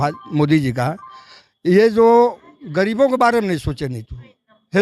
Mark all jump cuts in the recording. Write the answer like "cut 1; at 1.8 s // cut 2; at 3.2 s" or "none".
none